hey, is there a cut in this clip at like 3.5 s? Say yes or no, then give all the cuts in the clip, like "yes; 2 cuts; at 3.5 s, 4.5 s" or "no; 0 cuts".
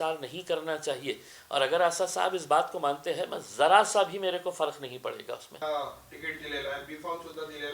no; 1 cut; at 5.5 s